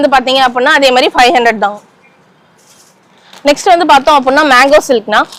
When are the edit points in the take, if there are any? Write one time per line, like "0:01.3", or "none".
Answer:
none